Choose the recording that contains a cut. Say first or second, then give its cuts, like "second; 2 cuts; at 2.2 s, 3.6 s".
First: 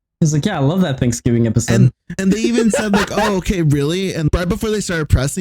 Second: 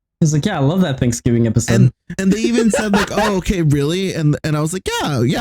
first; 1 cut; at 4.3 s